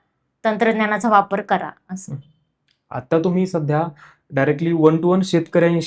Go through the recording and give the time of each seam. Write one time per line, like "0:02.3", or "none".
none